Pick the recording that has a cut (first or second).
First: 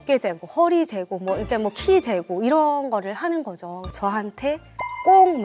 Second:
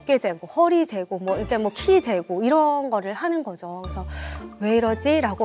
first